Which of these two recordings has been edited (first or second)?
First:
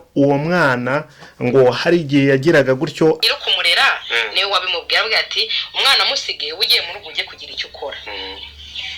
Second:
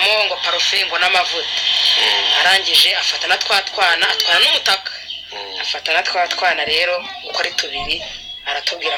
first